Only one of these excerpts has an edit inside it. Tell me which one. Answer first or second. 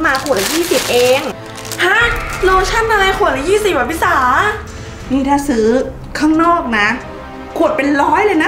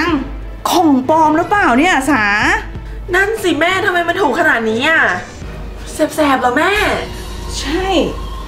second